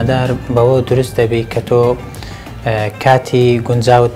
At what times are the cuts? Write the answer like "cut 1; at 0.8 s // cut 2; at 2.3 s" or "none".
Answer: none